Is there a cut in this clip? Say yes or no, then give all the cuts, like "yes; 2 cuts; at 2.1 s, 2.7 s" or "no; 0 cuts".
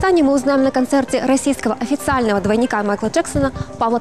no; 0 cuts